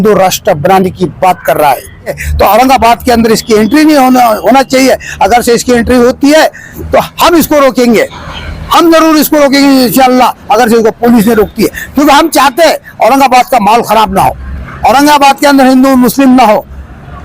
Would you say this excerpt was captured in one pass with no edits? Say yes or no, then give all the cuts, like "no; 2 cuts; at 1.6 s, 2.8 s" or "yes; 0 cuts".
no; 1 cut; at 2.2 s